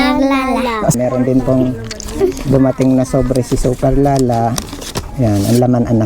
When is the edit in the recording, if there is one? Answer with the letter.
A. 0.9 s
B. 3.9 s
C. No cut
A